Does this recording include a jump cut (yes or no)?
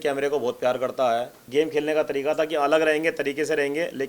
yes